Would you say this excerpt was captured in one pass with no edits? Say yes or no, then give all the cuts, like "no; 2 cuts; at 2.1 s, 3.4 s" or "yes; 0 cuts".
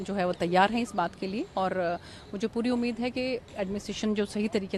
yes; 0 cuts